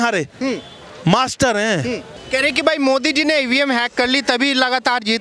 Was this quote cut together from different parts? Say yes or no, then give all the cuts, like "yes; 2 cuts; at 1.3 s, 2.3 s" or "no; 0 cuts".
yes; 1 cut; at 2.1 s